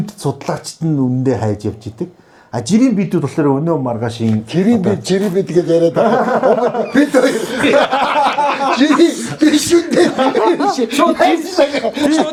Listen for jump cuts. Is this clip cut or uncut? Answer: uncut